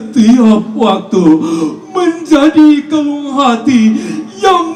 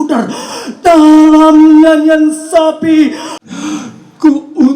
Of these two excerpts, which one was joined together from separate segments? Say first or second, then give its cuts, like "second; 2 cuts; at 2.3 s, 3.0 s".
second; 1 cut; at 3.3 s